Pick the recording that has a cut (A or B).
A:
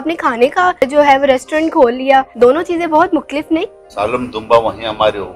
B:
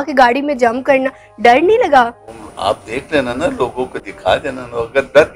A